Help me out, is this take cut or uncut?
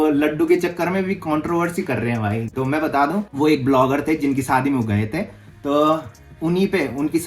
uncut